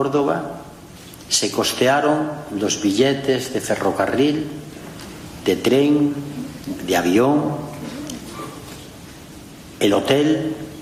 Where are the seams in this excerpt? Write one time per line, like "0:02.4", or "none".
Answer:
none